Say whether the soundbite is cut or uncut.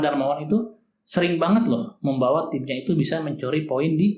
uncut